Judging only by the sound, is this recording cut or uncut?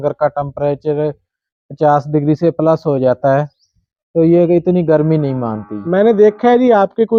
uncut